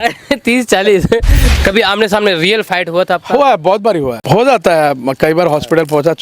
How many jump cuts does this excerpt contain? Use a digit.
2